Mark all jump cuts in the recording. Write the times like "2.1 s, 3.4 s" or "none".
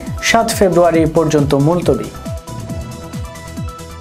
2.1 s